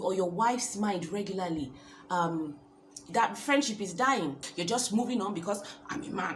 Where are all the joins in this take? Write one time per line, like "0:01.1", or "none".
0:04.4

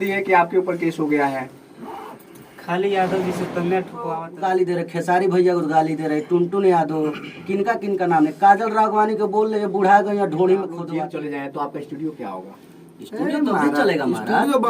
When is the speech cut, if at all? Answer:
0:04.3
0:10.9

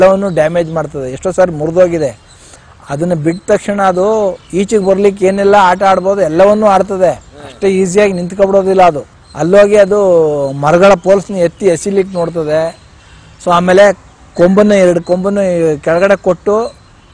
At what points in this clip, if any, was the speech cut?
none

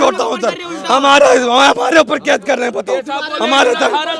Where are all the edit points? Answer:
none

